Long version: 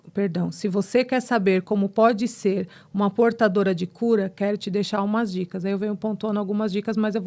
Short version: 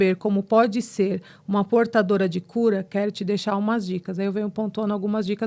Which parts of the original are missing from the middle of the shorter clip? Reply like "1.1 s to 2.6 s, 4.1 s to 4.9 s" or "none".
none